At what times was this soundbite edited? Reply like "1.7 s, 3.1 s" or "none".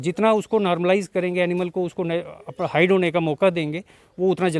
none